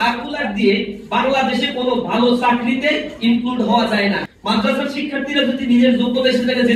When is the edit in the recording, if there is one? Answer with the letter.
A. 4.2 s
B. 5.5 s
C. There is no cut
A